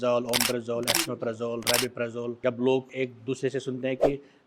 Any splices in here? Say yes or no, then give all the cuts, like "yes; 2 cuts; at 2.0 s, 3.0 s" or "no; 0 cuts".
yes; 2 cuts; at 2.4 s, 2.9 s